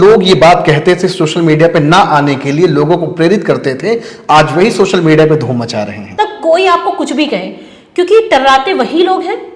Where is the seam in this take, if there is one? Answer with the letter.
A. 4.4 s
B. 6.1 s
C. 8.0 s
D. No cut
B